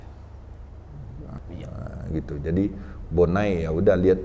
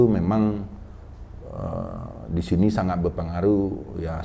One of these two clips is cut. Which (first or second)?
first